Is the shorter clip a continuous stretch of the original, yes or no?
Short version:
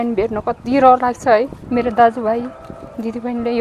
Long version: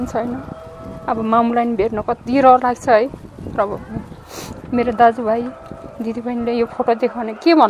no